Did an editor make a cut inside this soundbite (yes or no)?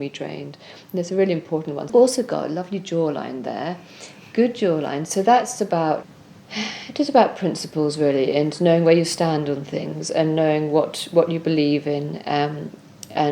yes